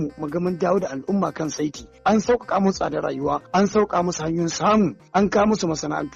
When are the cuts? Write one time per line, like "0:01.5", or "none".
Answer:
0:03.4
0:05.0